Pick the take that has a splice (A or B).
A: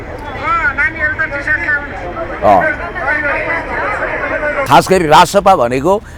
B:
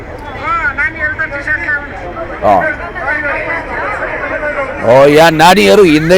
A